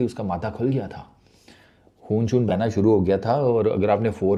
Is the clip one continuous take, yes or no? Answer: yes